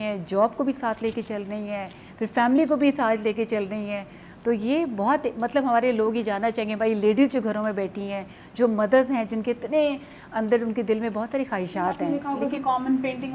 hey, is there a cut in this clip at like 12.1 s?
yes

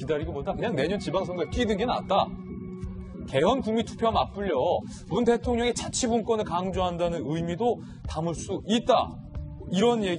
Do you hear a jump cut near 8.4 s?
no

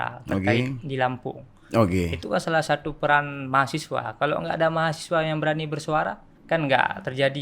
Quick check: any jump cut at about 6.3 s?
yes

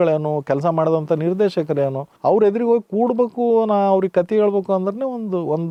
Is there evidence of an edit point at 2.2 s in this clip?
no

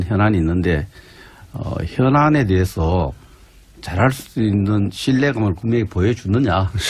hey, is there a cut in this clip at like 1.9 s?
yes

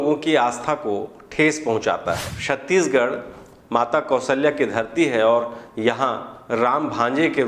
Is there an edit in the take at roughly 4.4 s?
no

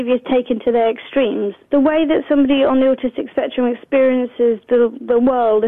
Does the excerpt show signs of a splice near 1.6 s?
yes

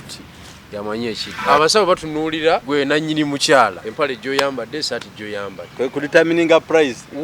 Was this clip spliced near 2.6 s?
yes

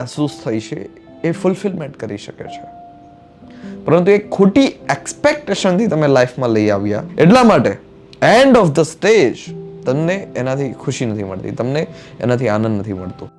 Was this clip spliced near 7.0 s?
yes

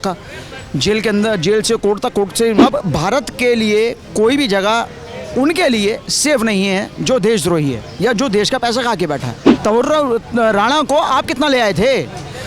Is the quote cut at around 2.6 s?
yes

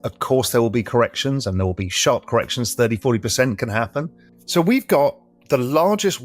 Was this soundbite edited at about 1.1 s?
no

